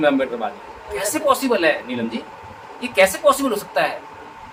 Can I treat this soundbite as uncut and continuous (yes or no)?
yes